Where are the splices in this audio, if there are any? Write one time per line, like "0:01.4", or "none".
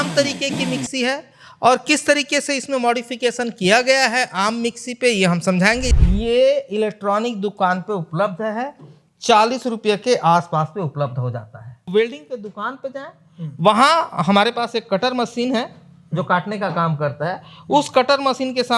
0:05.9
0:11.9